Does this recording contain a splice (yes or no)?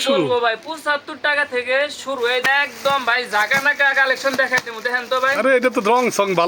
yes